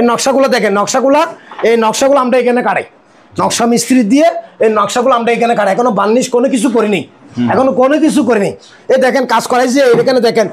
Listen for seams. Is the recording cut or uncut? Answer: uncut